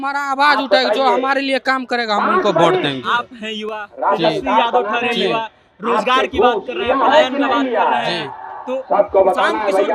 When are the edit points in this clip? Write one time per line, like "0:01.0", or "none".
none